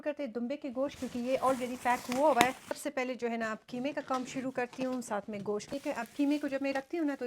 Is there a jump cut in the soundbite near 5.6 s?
yes; 2 cuts; at 2.7 s, 5.6 s

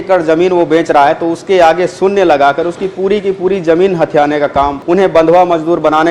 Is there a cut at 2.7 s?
no; 1 cut; at 4.8 s

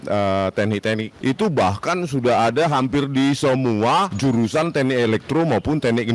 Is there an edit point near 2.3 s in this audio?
no; 2 cuts; at 1.1 s, 4.1 s

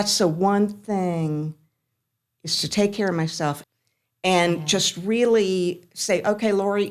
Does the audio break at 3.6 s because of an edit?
yes; 1 cut; at 3.6 s

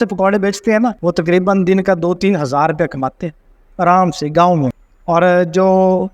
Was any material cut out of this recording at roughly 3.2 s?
no; 2 cuts; at 1.0 s, 4.9 s

